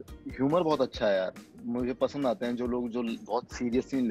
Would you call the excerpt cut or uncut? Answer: uncut